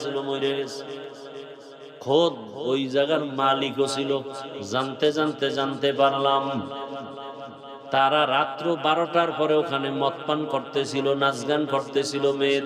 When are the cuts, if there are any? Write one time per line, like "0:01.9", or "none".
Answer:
0:04.5